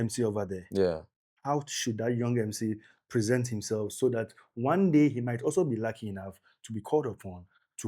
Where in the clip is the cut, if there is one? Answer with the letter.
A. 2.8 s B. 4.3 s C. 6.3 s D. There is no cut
D